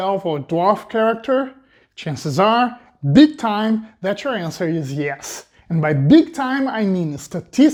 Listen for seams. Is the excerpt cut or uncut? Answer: uncut